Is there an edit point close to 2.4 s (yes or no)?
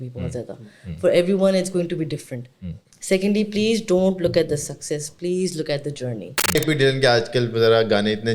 no